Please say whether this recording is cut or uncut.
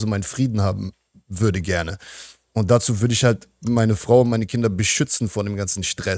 uncut